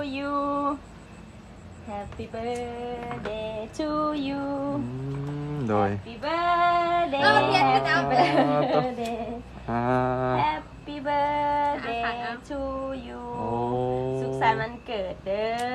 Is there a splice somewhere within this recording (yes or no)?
no